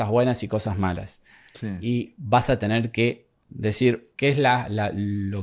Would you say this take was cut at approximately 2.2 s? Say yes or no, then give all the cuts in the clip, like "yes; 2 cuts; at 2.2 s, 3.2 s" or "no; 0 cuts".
no; 1 cut; at 3.7 s